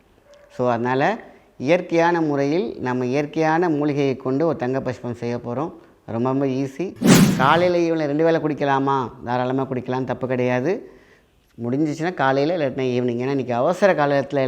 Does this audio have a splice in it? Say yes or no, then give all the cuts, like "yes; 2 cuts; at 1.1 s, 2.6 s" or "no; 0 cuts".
yes; 1 cut; at 7.1 s